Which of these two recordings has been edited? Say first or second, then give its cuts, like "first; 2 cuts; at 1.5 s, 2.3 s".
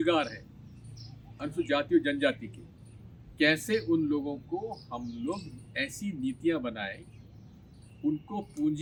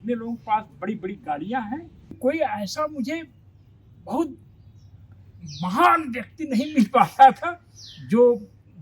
second; 1 cut; at 2.2 s